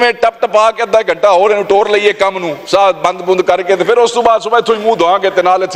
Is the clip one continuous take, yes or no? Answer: yes